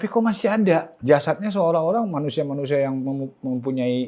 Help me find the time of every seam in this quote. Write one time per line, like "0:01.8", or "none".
0:00.9